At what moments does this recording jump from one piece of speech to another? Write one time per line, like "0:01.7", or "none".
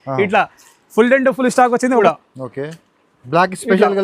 0:02.0